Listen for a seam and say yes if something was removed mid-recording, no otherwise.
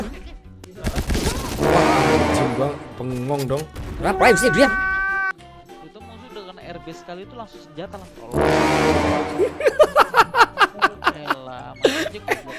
yes